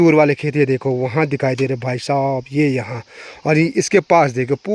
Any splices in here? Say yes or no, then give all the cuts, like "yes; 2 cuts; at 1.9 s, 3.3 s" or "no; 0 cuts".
no; 0 cuts